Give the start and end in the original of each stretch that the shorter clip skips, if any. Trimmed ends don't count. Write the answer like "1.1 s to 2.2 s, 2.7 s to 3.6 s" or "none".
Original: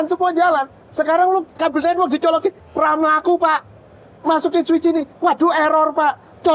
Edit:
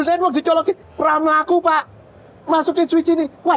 none